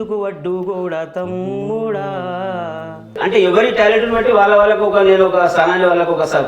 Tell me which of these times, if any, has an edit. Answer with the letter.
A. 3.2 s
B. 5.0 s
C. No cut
A